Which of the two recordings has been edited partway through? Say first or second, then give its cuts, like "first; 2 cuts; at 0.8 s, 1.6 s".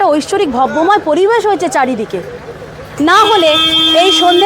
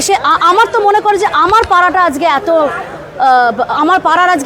first; 1 cut; at 2.8 s